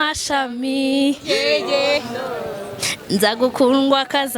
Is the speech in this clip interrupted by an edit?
no; 0 cuts

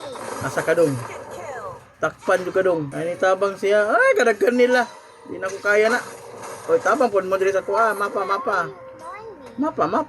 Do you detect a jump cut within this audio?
yes; 1 cut; at 2.9 s

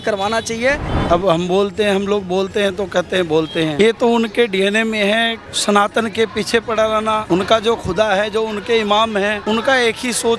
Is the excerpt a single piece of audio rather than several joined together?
no; 5 cuts; at 0.9 s, 3.7 s, 5.4 s, 7.2 s, 9.4 s

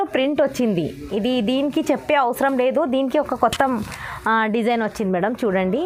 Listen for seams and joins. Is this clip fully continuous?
yes; 0 cuts

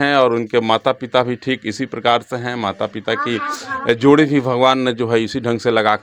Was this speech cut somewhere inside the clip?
no; 0 cuts

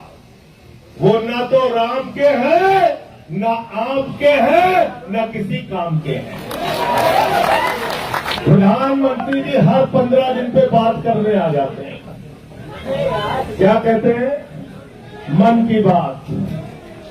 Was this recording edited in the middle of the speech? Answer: yes; 1 cut; at 8.3 s

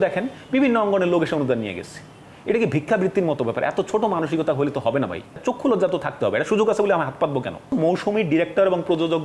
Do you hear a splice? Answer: yes; 2 cuts; at 5.4 s, 7.7 s

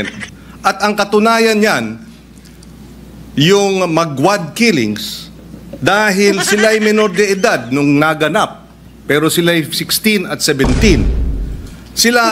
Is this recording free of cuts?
no; 1 cut; at 6.5 s

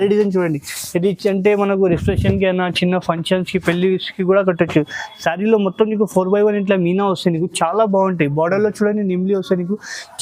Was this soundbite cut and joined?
no; 0 cuts

